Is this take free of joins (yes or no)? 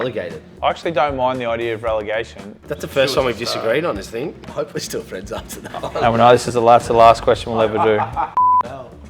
no